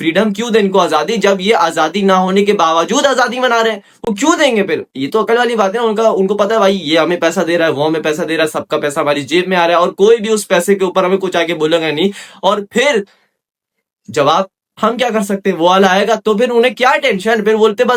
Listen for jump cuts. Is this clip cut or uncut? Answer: uncut